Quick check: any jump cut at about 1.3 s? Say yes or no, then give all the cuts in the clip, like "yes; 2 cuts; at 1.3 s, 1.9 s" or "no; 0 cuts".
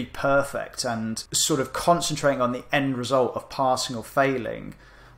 yes; 1 cut; at 1.3 s